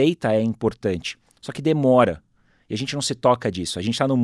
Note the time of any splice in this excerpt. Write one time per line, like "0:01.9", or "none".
none